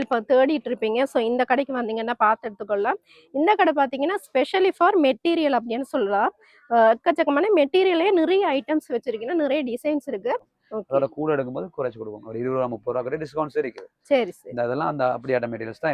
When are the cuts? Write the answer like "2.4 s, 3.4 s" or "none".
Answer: 10.6 s

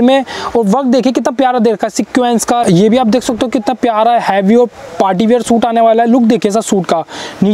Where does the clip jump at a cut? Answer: 2.6 s

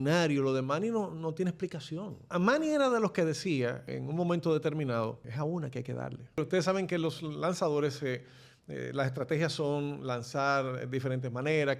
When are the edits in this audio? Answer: 2.3 s, 3.9 s, 5.2 s, 6.4 s

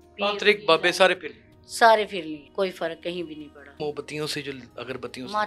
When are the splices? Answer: 2.4 s, 3.8 s

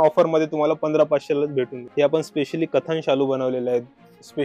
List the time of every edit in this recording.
1.8 s

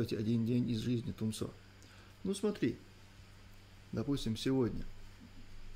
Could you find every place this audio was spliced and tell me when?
none

